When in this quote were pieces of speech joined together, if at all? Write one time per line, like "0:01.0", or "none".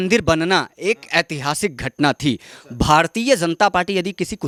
none